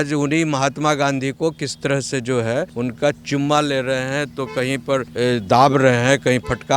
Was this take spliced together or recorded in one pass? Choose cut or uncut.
cut